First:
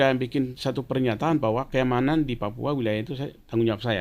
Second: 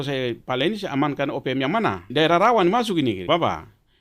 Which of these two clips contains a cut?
second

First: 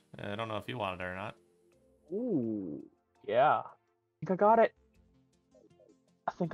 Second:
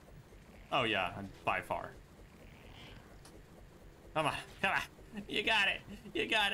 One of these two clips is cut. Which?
first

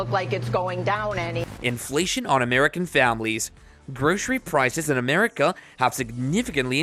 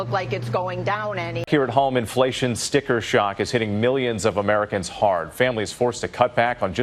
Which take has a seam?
second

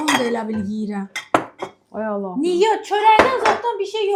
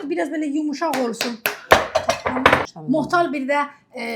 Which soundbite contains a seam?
second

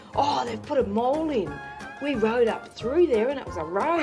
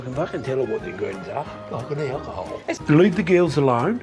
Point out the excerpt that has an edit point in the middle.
second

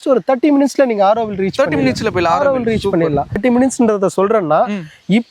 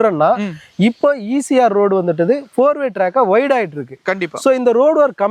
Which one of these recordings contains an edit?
first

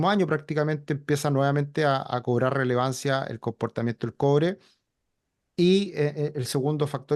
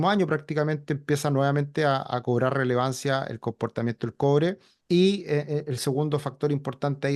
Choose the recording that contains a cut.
second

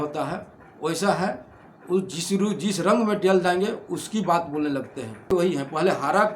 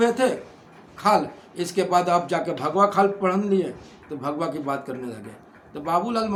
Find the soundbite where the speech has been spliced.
first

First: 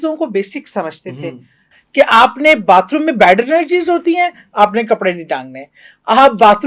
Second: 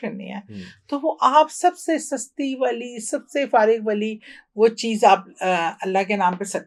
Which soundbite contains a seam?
first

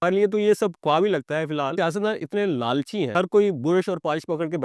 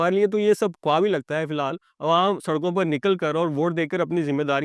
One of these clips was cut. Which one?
first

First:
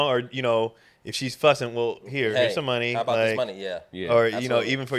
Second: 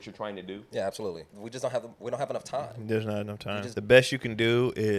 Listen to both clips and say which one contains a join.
second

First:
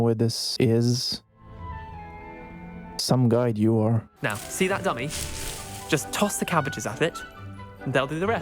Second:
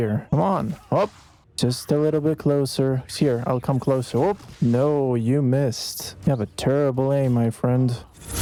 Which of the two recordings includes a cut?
first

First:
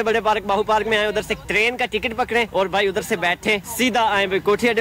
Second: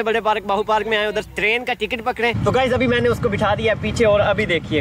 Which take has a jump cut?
second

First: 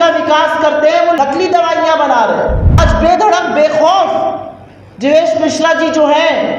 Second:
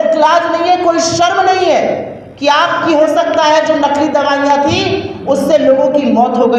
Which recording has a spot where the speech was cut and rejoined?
first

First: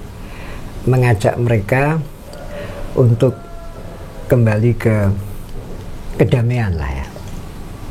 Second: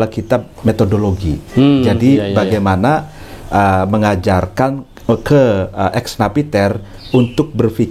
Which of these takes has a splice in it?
first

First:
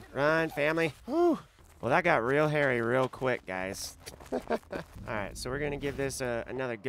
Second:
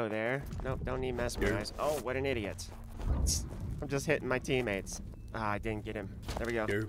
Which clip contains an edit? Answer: first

